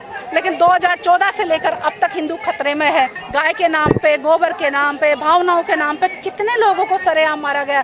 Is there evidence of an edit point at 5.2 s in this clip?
no; 1 cut; at 3.1 s

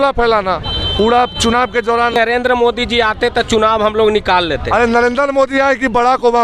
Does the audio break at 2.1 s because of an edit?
yes; 1 cut; at 2.1 s

